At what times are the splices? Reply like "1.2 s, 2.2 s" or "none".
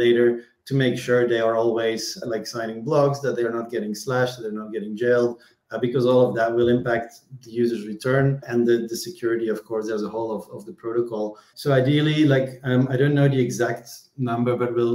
2.2 s, 8.4 s, 11.5 s